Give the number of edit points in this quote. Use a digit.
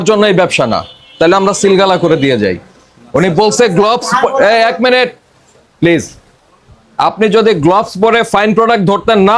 0